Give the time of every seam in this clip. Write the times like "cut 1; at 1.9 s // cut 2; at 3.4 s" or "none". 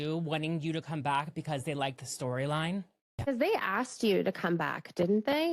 cut 1; at 3.2 s